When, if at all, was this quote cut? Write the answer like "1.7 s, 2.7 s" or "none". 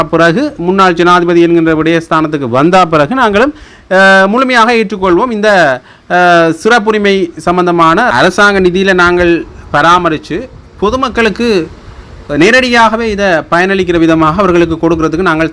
8.1 s